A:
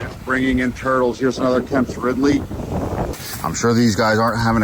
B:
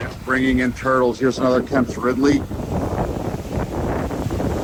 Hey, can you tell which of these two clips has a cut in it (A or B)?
A